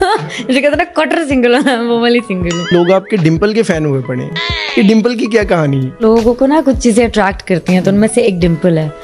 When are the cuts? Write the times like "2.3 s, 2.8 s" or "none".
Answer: 2.7 s, 6.0 s